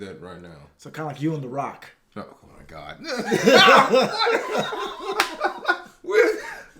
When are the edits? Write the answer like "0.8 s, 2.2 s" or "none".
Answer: 2.3 s